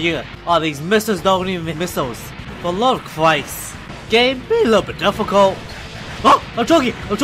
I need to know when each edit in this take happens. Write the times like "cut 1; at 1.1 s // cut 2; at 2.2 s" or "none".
none

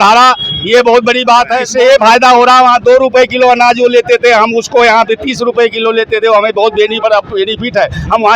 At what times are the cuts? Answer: cut 1; at 1.6 s

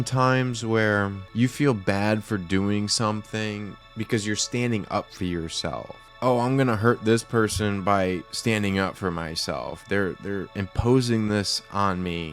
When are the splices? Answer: cut 1; at 1.2 s // cut 2; at 3.8 s // cut 3; at 6.0 s

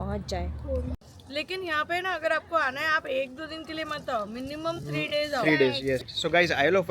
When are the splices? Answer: cut 1; at 1.0 s // cut 2; at 6.1 s

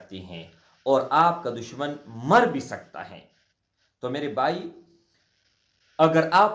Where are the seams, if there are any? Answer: none

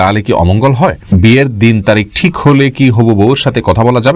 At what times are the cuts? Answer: cut 1; at 1.1 s

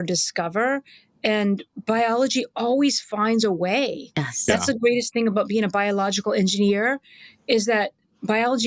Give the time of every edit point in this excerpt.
none

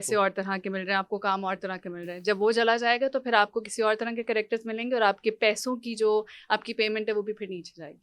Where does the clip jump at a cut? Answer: none

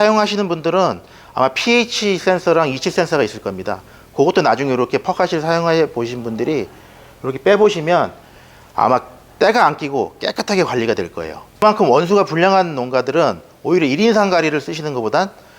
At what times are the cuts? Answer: cut 1; at 11.6 s

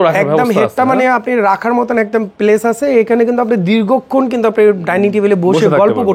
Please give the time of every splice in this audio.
none

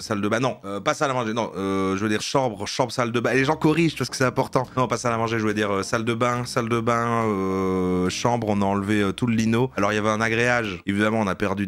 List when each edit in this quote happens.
cut 1; at 2.2 s // cut 2; at 10.8 s

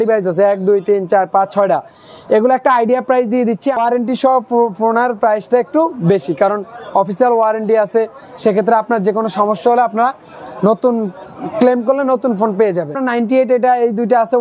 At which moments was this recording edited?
cut 1; at 3.8 s // cut 2; at 12.9 s

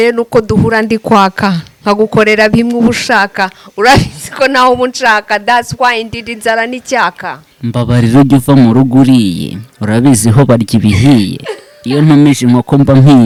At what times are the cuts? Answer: none

